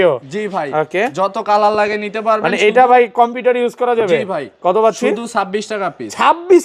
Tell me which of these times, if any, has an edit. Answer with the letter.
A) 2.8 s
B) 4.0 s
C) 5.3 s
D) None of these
D